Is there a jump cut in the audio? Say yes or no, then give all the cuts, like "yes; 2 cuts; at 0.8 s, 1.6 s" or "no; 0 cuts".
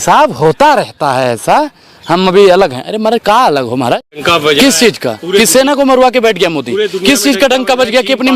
yes; 1 cut; at 4.2 s